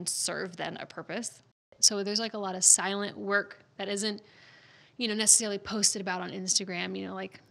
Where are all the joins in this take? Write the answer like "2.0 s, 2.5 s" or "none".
1.6 s